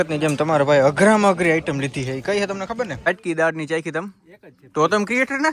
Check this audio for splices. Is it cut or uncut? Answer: cut